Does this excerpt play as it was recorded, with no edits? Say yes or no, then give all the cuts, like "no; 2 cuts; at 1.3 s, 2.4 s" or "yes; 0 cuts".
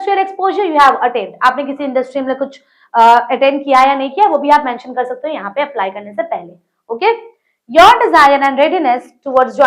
yes; 0 cuts